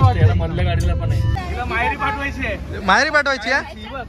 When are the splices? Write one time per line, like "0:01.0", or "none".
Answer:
0:01.3